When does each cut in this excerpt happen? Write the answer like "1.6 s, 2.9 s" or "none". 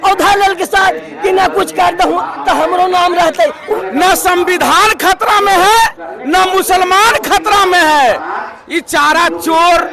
3.8 s